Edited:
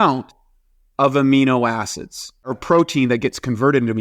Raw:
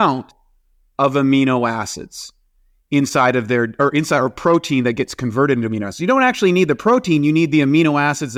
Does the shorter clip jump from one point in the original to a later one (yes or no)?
yes